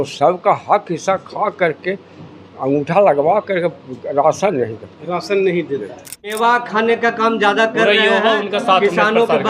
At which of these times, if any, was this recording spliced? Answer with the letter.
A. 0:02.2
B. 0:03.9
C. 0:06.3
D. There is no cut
C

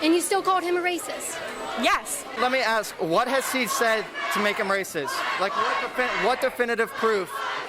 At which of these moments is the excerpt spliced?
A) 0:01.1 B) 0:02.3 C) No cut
B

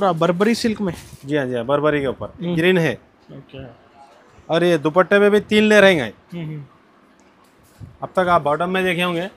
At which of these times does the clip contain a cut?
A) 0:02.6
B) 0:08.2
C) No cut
A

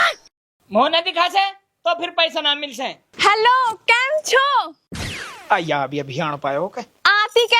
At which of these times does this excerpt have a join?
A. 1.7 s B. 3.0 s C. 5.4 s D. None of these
B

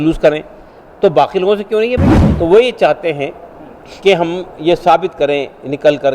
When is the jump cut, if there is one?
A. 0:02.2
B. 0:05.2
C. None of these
A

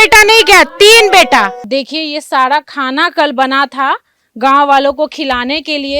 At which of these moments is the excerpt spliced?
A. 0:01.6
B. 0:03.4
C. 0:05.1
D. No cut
A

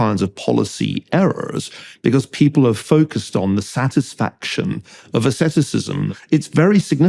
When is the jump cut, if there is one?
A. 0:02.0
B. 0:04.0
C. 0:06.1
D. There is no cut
C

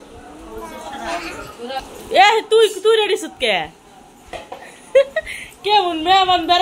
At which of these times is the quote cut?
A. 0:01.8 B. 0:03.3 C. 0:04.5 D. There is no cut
A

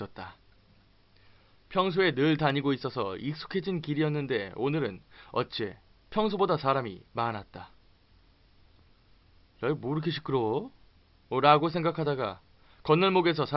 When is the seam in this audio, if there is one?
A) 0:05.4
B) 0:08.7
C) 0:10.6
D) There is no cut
C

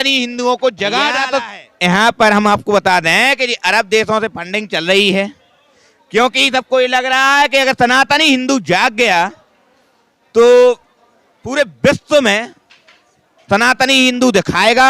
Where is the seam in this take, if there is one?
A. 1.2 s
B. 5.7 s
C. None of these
A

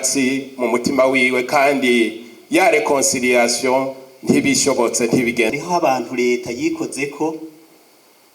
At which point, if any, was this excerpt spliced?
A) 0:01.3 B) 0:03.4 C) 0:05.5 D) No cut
C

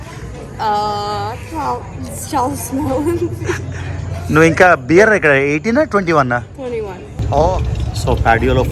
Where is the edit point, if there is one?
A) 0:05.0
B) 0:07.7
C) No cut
B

